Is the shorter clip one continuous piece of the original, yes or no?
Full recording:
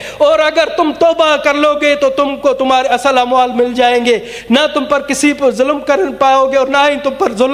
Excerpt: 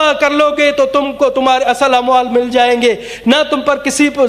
yes